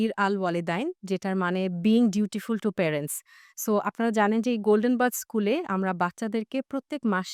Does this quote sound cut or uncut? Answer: uncut